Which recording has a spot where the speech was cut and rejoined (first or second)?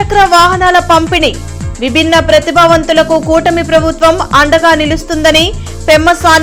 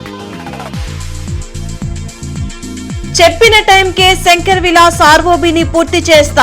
second